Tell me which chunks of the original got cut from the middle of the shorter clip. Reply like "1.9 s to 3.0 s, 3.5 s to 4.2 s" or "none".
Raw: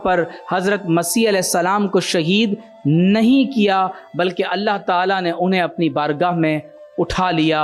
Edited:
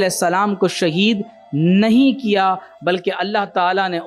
none